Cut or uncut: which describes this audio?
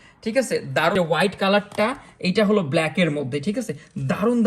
cut